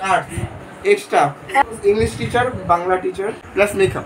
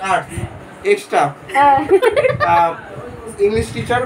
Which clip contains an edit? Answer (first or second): first